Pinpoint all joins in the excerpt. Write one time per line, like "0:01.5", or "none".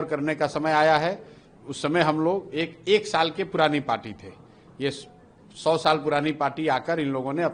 none